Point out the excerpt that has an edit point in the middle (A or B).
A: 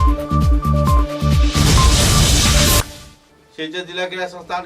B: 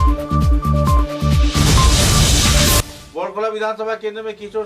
A